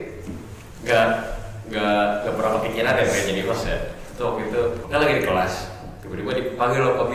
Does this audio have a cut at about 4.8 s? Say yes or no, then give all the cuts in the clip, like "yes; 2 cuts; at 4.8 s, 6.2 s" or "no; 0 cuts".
yes; 1 cut; at 4.8 s